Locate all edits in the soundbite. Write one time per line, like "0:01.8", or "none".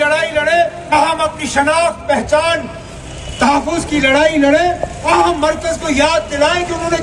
0:00.9
0:05.1